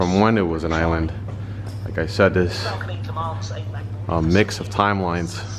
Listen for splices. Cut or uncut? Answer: uncut